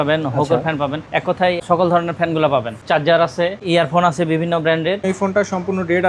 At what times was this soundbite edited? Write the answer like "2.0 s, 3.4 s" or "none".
1.6 s, 2.8 s, 3.6 s, 5.0 s